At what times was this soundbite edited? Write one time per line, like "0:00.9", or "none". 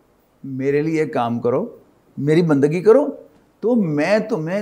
0:02.1